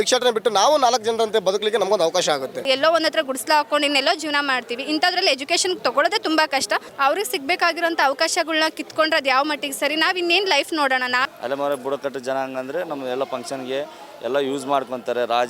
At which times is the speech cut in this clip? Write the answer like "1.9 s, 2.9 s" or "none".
2.7 s, 6.9 s, 11.3 s